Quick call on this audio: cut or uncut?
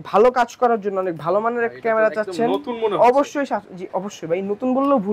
uncut